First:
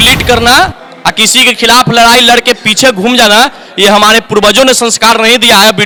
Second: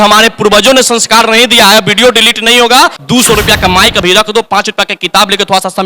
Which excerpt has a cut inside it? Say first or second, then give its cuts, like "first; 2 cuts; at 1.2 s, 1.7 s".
second; 1 cut; at 3.0 s